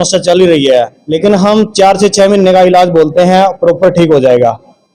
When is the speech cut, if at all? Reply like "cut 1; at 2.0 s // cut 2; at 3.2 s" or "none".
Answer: cut 1; at 1.0 s